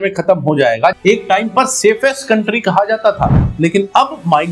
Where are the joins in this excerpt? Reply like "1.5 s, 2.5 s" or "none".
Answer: 1.0 s